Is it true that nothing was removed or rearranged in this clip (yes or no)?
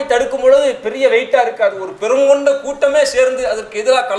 yes